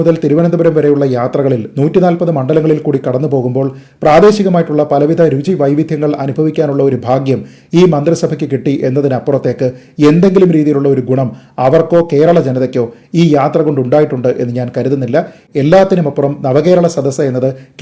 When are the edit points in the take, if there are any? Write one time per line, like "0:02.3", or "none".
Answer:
0:15.4